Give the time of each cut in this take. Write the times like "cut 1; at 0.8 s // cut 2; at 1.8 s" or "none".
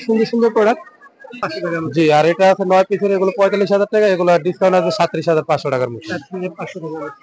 cut 1; at 1.5 s

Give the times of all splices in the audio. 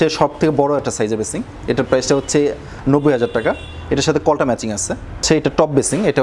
cut 1; at 5.2 s

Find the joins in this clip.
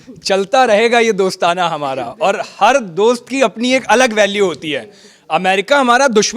none

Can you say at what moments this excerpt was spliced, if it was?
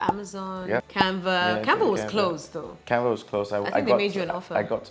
none

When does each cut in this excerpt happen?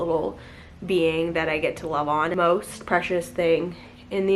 cut 1; at 2.3 s

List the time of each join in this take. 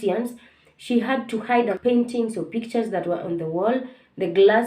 cut 1; at 1.7 s

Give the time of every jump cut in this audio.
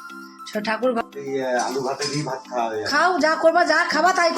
cut 1; at 1.0 s

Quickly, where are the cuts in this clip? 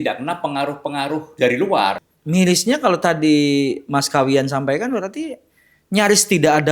cut 1; at 2.0 s

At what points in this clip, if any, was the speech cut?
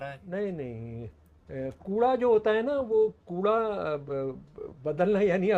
none

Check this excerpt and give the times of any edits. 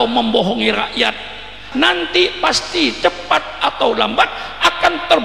cut 1; at 1.6 s

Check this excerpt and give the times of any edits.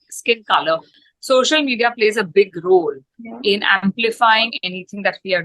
cut 1; at 0.9 s

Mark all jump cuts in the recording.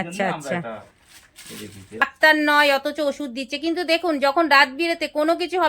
cut 1; at 2.0 s

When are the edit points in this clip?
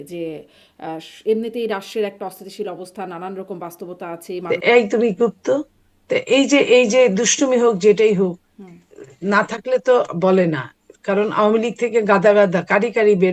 cut 1; at 4.3 s

